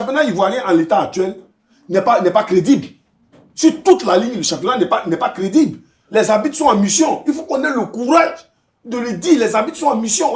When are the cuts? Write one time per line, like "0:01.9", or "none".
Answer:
none

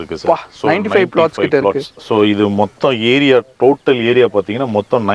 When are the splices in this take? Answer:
none

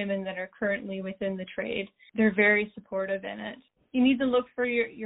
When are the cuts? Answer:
none

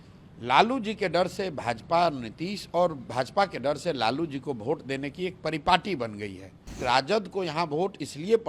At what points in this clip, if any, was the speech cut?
0:06.8

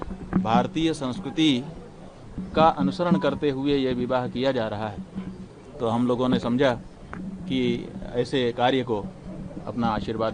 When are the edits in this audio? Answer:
none

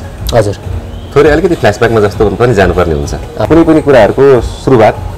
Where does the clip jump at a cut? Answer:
0:03.4

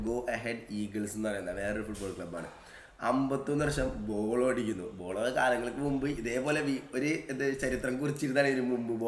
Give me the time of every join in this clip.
none

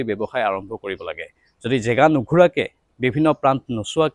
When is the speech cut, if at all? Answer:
none

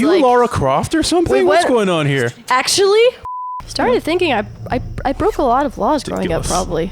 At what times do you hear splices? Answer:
0:03.3

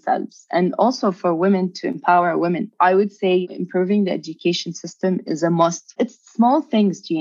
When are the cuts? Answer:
0:02.7
0:03.5
0:05.9

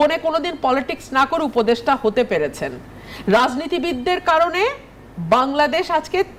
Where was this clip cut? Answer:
none

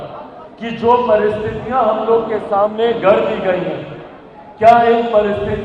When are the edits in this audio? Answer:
none

